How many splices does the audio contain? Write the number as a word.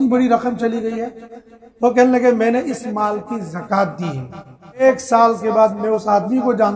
one